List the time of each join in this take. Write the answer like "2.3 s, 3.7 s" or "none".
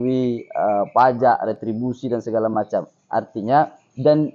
none